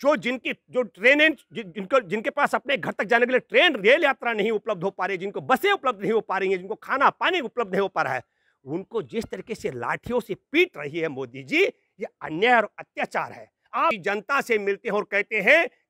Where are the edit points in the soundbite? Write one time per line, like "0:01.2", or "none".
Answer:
0:14.0